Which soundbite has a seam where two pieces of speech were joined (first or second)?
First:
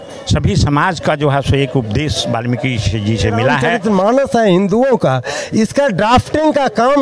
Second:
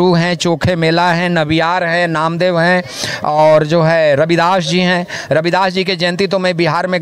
first